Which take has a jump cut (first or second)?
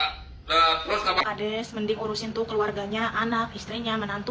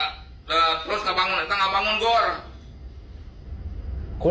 first